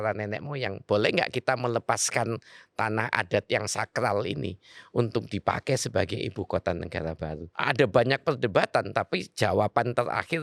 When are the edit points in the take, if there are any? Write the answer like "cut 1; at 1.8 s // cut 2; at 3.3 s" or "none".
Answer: cut 1; at 7.5 s

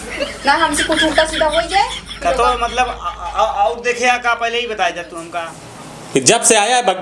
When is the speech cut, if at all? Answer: cut 1; at 5.1 s

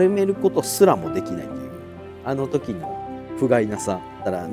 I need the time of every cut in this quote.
none

